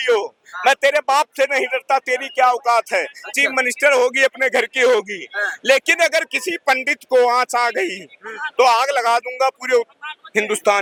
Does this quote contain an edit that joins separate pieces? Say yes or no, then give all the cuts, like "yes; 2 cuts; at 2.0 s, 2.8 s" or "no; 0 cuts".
no; 0 cuts